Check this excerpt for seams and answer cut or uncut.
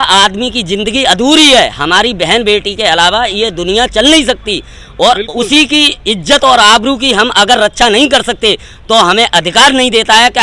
uncut